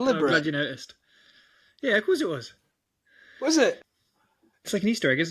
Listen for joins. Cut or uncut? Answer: cut